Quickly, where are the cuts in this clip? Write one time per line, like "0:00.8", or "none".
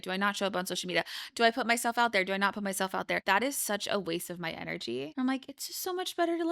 0:03.2
0:05.1